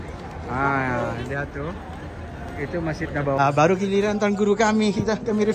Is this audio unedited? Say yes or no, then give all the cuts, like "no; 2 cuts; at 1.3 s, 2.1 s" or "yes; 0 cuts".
no; 1 cut; at 3.4 s